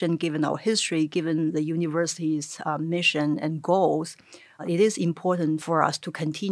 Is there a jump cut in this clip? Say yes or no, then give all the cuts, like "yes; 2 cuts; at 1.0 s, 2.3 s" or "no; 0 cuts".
yes; 1 cut; at 5.6 s